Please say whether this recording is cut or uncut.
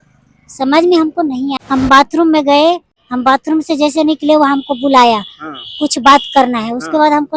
cut